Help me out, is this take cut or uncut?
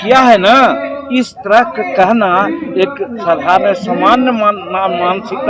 uncut